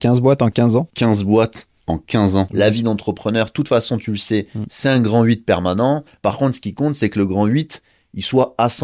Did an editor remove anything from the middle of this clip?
yes; 3 cuts; at 0.9 s, 2.5 s, 6.1 s

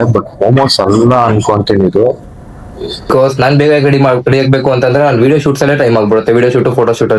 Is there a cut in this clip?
yes; 1 cut; at 3.1 s

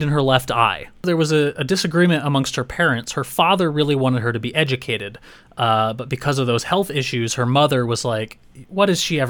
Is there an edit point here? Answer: yes; 1 cut; at 1.1 s

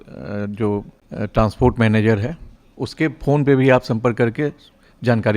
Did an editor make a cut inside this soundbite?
yes; 1 cut; at 1.0 s

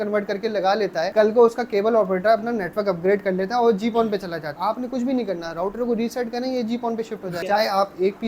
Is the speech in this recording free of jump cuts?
no; 3 cuts; at 1.1 s, 4.5 s, 7.4 s

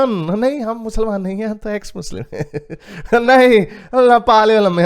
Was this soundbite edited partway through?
no; 0 cuts

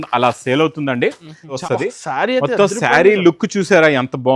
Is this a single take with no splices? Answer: no; 1 cut; at 1.6 s

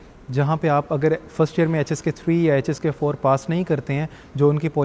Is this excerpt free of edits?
yes; 0 cuts

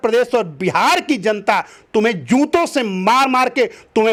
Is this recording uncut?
yes; 0 cuts

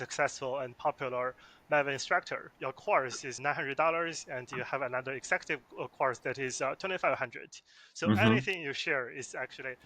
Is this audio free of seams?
no; 2 cuts; at 2.4 s, 3.4 s

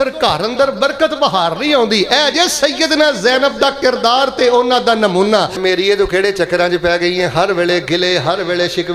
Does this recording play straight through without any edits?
no; 1 cut; at 5.6 s

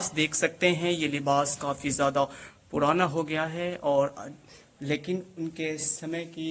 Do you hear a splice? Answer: no; 0 cuts

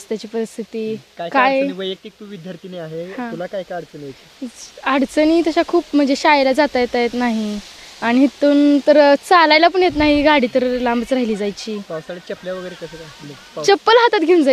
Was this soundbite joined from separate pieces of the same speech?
no; 0 cuts

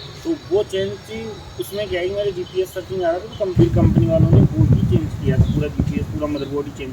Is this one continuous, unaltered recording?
no; 1 cut; at 3.6 s

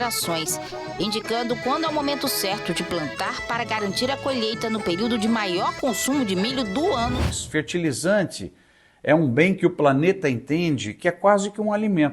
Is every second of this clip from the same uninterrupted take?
no; 1 cut; at 7.2 s

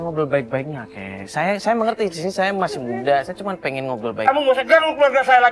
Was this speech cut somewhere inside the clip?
no; 0 cuts

